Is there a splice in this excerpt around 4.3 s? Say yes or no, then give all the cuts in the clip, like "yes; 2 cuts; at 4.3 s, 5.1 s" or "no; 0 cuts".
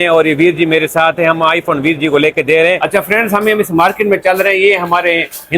no; 1 cut; at 2.8 s